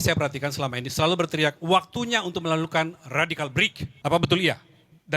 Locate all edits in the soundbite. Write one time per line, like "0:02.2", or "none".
0:03.8

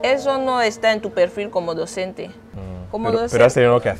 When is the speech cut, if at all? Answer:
none

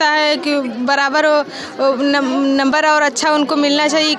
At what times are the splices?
none

